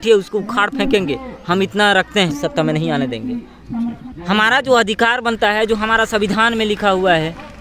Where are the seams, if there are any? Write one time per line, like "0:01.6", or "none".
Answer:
0:02.3
0:03.9